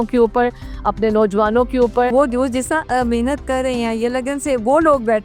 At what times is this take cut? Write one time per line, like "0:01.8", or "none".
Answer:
0:02.1